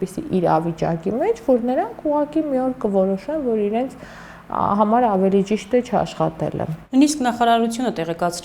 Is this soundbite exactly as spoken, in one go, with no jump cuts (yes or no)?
yes